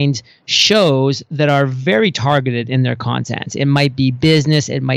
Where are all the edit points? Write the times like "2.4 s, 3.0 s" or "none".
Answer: none